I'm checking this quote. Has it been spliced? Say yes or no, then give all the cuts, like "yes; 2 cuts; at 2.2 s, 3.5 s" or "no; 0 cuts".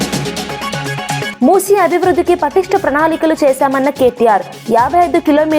yes; 1 cut; at 1.3 s